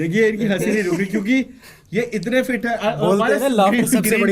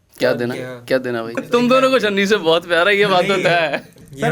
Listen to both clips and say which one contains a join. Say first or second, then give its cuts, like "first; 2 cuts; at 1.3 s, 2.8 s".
second; 1 cut; at 1.4 s